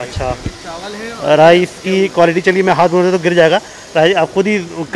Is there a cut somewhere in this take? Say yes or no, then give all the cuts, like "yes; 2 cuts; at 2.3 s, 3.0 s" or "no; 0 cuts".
no; 0 cuts